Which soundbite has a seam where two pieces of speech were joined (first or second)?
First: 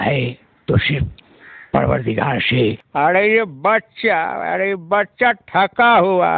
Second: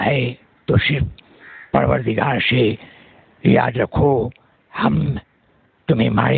first